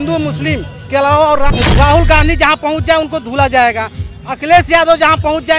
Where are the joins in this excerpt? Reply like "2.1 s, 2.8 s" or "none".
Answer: 1.5 s